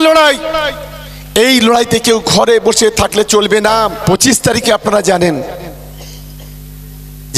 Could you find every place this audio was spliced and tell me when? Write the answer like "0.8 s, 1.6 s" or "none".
4.0 s